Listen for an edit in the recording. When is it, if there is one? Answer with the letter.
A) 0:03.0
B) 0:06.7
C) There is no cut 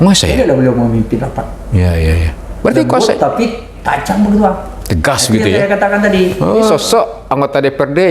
B